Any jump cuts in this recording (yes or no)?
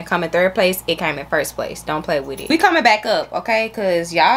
yes